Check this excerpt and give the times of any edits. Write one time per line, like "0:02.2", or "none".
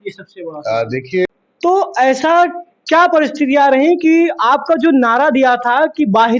0:01.3